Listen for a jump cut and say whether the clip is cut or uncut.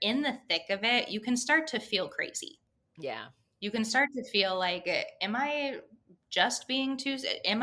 uncut